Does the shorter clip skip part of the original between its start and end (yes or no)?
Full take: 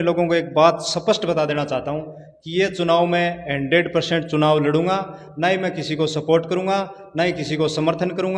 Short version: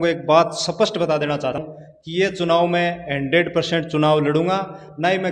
yes